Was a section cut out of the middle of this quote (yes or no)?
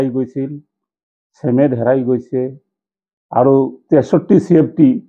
no